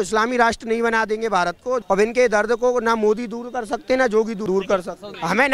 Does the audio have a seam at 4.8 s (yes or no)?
yes